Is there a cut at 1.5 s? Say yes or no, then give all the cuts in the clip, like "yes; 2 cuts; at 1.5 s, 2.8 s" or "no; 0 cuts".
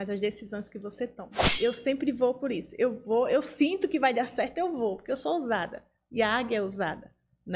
yes; 1 cut; at 1.5 s